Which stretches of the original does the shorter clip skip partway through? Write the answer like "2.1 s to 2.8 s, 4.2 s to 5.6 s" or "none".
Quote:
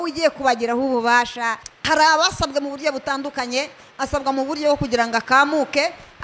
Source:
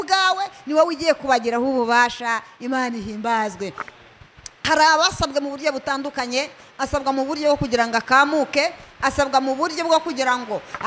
2.5 s to 4.4 s